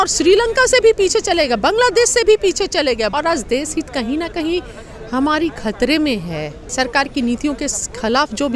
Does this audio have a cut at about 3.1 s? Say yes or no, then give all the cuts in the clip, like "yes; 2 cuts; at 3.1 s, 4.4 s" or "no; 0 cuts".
yes; 2 cuts; at 3.1 s, 6.7 s